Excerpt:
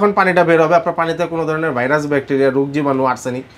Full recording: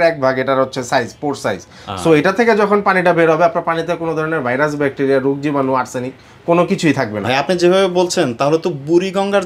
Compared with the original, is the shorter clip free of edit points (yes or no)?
yes